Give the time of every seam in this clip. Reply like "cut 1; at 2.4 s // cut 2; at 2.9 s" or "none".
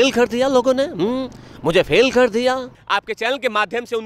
cut 1; at 2.8 s